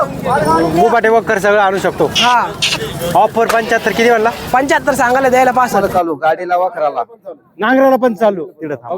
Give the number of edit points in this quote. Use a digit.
1